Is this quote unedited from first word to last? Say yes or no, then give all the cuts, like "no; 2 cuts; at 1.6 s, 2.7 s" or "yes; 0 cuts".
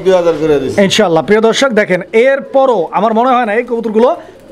yes; 0 cuts